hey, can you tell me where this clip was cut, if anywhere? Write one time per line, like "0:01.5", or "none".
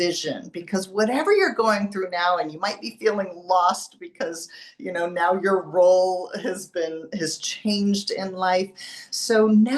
none